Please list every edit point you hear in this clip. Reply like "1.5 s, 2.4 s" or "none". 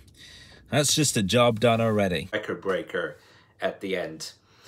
2.3 s

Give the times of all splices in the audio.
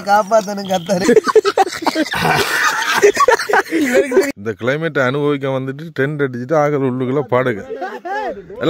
1.0 s, 4.3 s

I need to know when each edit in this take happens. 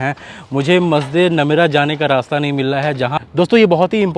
3.2 s

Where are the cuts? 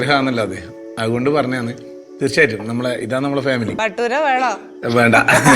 3.8 s

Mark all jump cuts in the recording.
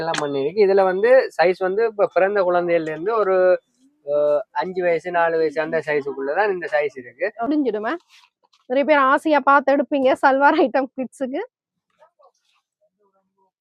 7.5 s

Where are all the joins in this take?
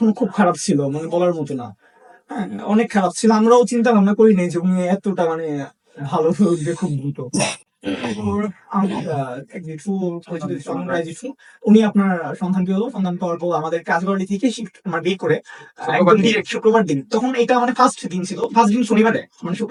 none

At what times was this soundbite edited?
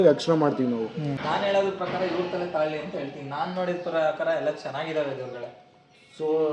1.1 s

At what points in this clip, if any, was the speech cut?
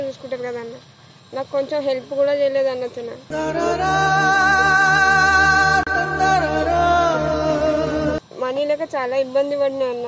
none

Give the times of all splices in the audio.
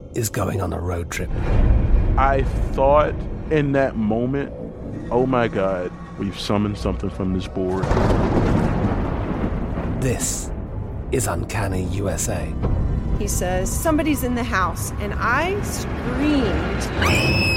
none

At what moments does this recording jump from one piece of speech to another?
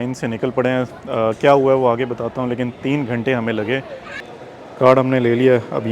4.1 s

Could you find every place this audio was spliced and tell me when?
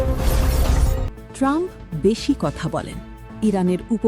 0.9 s

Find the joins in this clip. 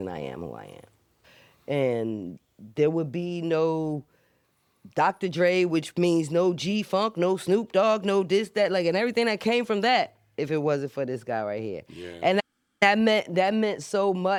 none

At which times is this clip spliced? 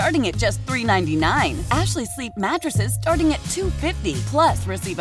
none

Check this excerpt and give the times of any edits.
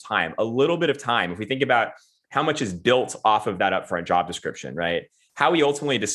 5.2 s

